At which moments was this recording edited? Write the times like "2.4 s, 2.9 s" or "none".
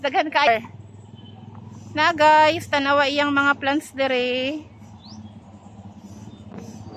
none